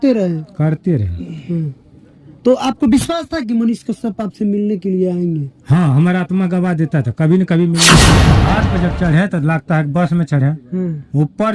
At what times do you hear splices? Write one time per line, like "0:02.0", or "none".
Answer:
0:08.1